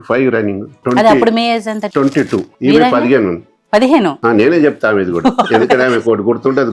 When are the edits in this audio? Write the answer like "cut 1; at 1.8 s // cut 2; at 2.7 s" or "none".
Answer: cut 1; at 0.8 s // cut 2; at 2.0 s

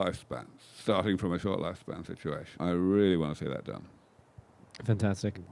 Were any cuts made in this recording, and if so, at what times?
cut 1; at 2.6 s

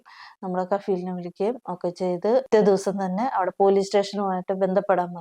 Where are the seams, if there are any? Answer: cut 1; at 2.5 s

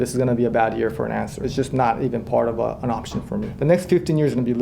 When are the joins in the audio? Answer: cut 1; at 1.4 s // cut 2; at 3.5 s

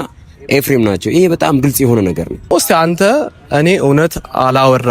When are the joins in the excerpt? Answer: cut 1; at 2.5 s

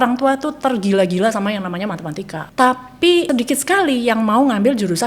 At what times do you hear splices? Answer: cut 1; at 2.5 s // cut 2; at 3.3 s

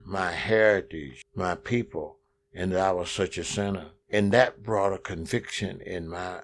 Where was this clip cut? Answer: cut 1; at 3.9 s

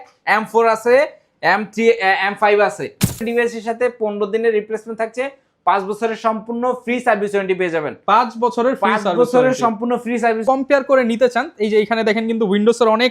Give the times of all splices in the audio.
cut 1; at 3.2 s // cut 2; at 10.4 s

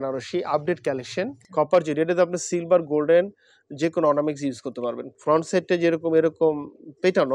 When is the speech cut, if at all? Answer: cut 1; at 1.4 s // cut 2; at 5.1 s

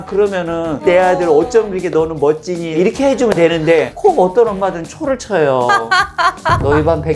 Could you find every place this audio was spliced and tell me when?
cut 1; at 0.8 s // cut 2; at 2.8 s

